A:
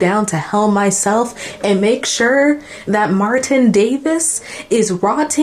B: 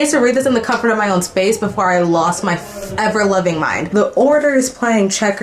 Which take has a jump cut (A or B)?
B